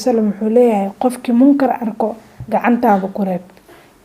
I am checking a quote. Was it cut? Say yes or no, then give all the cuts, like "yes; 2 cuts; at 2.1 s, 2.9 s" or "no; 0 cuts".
yes; 1 cut; at 2.3 s